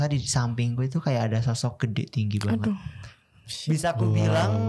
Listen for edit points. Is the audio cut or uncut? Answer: uncut